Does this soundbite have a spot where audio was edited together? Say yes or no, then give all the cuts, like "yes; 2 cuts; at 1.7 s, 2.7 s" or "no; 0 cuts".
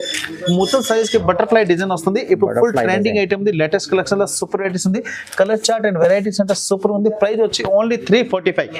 no; 0 cuts